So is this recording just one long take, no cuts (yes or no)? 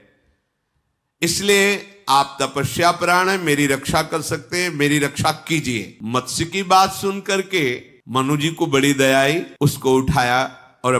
no